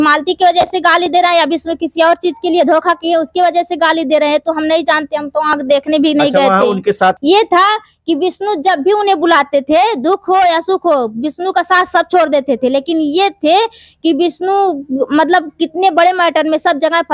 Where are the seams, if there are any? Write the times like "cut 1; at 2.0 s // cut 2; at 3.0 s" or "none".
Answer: cut 1; at 7.2 s

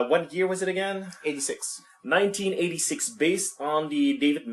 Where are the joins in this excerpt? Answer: none

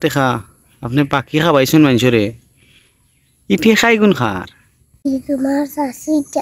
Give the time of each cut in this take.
cut 1; at 5.1 s

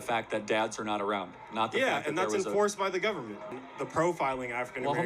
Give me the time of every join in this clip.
cut 1; at 3.5 s

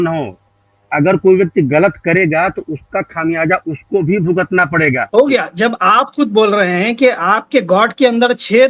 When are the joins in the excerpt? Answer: cut 1; at 5.0 s

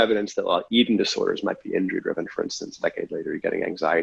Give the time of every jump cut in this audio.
none

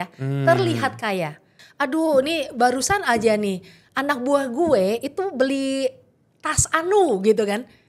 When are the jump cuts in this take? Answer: cut 1; at 1.6 s

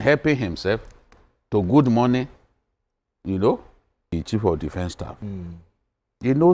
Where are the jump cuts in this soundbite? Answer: cut 1; at 4.1 s

